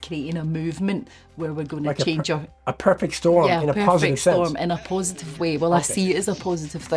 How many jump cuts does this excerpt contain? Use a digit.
0